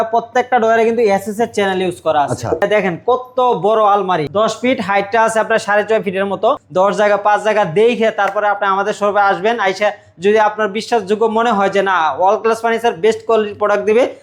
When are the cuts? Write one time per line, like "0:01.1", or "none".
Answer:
0:02.6
0:04.3
0:06.6